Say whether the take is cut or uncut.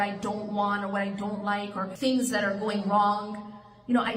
cut